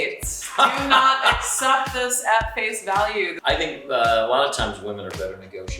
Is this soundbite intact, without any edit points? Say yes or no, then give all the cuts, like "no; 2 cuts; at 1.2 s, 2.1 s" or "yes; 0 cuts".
no; 1 cut; at 3.3 s